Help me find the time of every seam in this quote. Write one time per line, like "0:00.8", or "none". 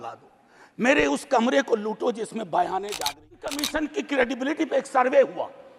0:03.5

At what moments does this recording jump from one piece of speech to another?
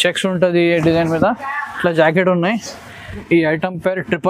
0:03.2

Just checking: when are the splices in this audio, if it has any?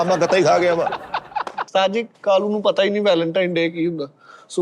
0:01.7

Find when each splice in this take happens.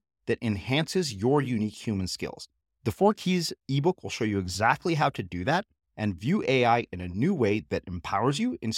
none

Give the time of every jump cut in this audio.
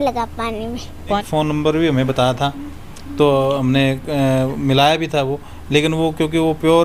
0:01.2

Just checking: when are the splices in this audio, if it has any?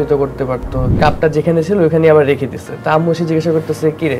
0:00.9

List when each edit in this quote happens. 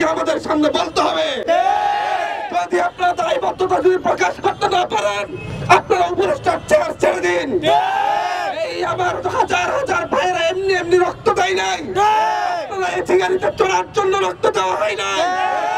none

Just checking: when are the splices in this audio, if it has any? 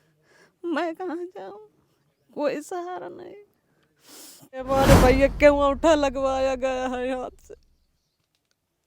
0:04.8

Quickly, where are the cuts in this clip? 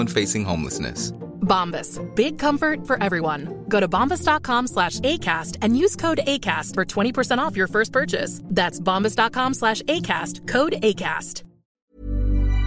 0:11.7

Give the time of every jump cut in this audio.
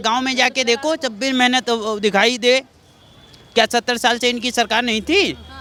none

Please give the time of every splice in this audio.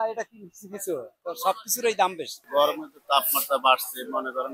0:02.3

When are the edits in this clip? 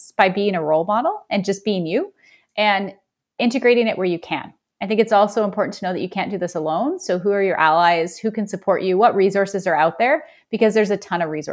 none

